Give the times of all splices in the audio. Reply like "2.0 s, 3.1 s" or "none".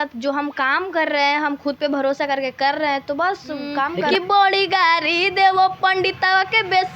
4.1 s